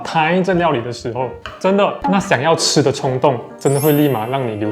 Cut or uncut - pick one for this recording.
uncut